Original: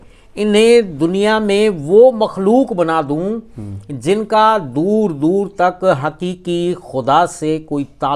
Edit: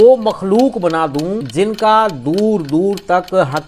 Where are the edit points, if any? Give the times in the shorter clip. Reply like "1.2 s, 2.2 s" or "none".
1.4 s